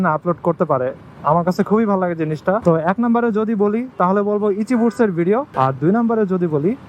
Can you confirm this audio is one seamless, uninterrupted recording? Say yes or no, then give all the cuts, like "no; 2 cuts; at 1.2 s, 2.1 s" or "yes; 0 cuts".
no; 2 cuts; at 2.6 s, 5.5 s